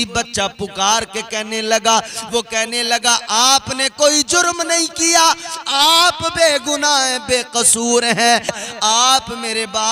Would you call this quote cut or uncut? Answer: cut